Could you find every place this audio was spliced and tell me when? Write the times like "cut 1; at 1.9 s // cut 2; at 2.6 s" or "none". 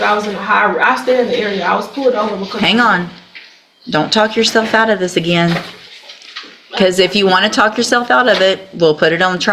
none